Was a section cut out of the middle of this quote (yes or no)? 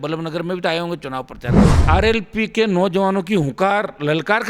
yes